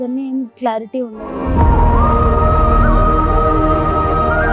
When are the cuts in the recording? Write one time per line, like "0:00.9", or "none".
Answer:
0:01.2

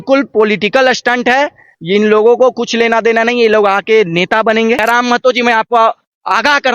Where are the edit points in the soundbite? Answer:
0:04.8

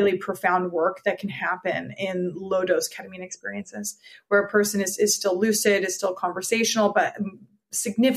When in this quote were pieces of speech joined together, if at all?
none

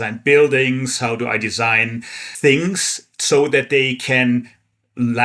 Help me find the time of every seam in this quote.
0:02.3

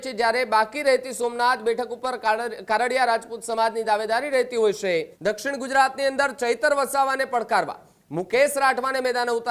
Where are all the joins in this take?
0:05.1

